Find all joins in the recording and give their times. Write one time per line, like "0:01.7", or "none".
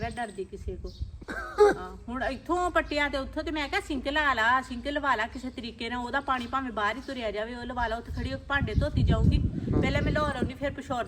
0:01.1